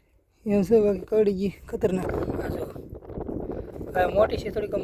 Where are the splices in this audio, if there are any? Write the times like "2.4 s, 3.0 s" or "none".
2.0 s

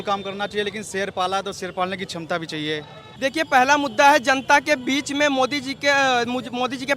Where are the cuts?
3.0 s

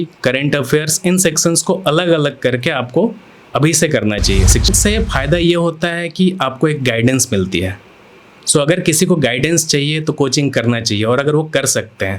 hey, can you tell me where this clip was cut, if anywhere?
4.7 s

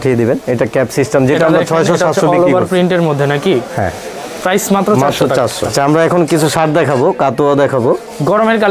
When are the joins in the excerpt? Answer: 5.7 s

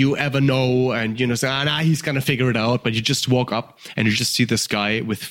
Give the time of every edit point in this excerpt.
none

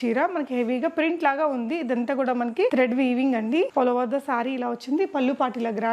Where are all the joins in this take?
none

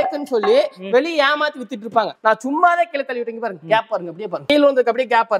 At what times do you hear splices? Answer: 2.2 s, 4.4 s

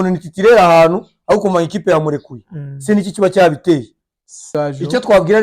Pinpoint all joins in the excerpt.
4.5 s

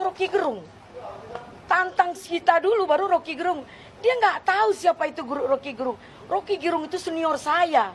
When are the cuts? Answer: none

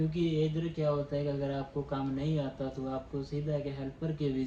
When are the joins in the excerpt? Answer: none

